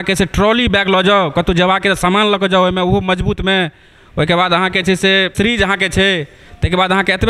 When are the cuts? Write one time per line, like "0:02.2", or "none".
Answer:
0:05.3

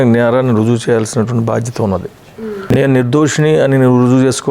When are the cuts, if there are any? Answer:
0:02.7

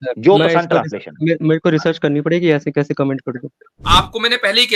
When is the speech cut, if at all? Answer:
0:03.8

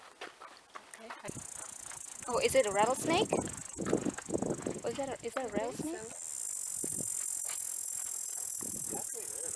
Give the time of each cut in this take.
0:01.2

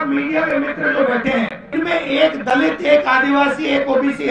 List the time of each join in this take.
0:01.7

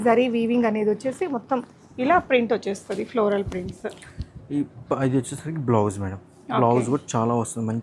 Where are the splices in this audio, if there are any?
none

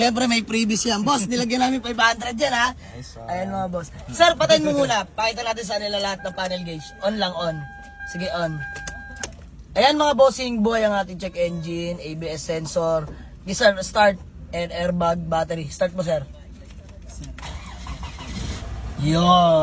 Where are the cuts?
none

